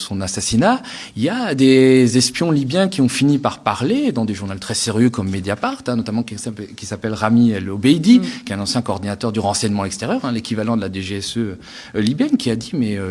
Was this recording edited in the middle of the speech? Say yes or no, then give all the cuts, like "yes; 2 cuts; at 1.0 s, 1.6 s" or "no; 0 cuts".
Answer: no; 0 cuts